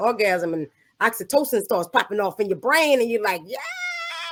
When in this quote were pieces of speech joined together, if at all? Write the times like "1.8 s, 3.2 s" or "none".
none